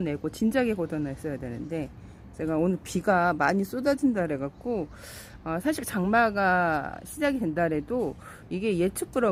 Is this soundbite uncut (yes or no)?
yes